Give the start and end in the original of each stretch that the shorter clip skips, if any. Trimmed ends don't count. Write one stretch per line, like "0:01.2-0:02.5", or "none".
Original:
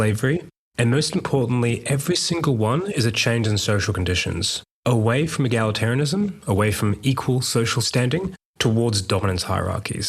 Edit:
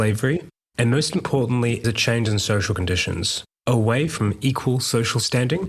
0:01.8-0:03.0
0:05.3-0:06.8